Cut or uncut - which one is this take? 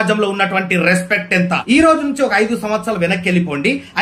cut